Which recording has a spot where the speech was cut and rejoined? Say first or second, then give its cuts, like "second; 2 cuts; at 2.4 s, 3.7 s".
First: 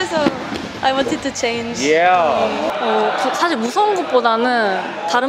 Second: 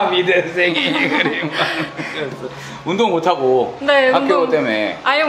first; 1 cut; at 2.7 s